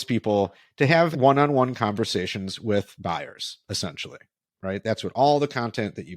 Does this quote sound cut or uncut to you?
cut